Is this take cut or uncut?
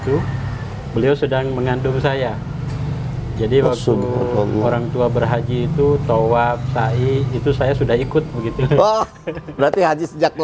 uncut